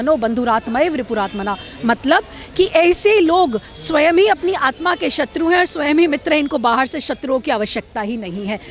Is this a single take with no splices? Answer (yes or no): yes